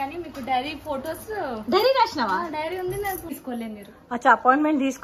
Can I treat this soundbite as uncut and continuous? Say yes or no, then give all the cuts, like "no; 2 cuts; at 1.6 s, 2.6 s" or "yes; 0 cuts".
no; 1 cut; at 3.3 s